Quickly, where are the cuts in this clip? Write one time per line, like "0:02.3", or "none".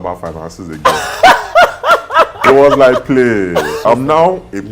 0:03.8